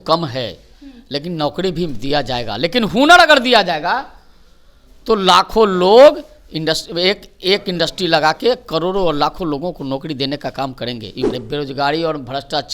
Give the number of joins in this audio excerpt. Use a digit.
1